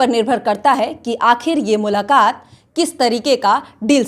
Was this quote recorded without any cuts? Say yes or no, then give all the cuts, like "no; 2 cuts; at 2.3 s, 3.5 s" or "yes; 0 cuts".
yes; 0 cuts